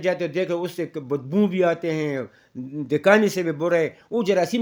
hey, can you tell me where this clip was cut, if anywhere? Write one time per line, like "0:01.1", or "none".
none